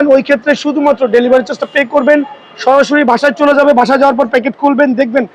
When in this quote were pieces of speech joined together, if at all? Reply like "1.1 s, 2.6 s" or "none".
none